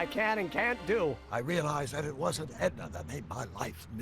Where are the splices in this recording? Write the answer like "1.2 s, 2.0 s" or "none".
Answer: 1.2 s